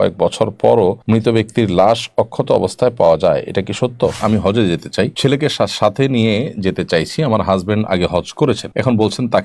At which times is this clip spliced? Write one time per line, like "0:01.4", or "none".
0:01.0
0:04.2
0:05.1
0:08.7